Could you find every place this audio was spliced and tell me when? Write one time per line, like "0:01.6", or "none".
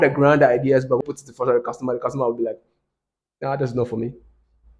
0:01.0